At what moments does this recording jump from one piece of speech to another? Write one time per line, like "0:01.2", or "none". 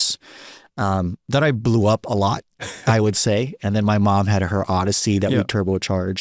none